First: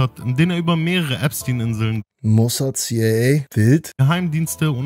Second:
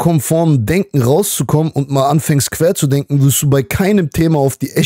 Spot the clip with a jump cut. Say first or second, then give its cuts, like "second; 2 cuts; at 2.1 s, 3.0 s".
first; 2 cuts; at 2.1 s, 3.7 s